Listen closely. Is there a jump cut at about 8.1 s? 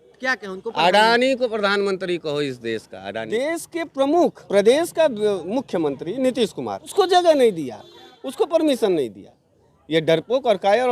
no; 3 cuts; at 3.3 s, 4.4 s, 6.9 s

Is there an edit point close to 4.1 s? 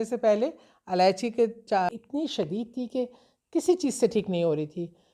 no; 1 cut; at 1.9 s

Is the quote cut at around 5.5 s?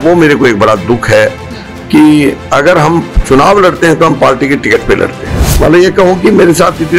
yes; 1 cut; at 5.5 s

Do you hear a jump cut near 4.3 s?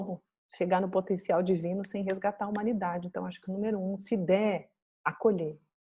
no; 0 cuts

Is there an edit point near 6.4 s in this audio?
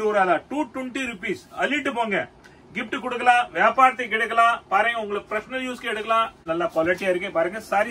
yes; 1 cut; at 6.4 s

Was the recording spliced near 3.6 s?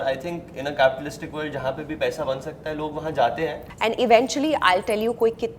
yes; 1 cut; at 3.6 s

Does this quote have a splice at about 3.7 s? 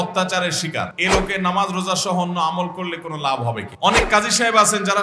yes; 2 cuts; at 0.9 s, 3.7 s

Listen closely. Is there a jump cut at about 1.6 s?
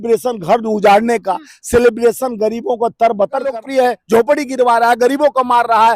no; 1 cut; at 3.5 s

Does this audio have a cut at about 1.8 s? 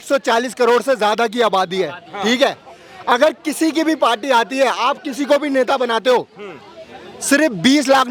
no; 0 cuts

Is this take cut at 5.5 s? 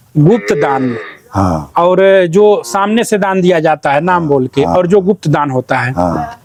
no; 0 cuts

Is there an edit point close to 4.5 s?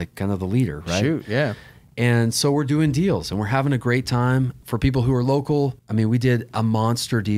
yes; 2 cuts; at 4.5 s, 5.8 s

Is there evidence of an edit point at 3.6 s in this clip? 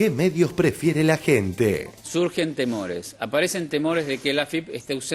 no; 1 cut; at 2.0 s

